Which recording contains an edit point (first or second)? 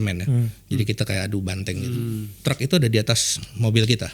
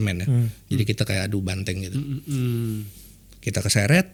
first